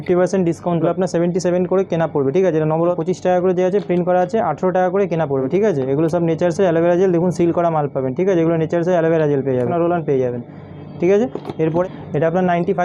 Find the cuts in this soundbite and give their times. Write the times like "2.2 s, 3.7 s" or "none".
0.8 s, 3.0 s, 5.5 s, 9.7 s, 11.8 s